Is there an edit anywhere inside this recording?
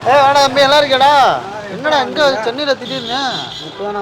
no; 0 cuts

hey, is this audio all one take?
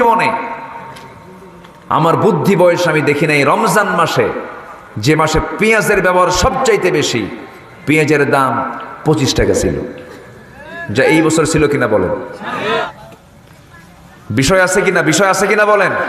no; 1 cut; at 12.8 s

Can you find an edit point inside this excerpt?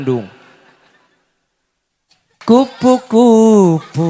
yes; 1 cut; at 2.3 s

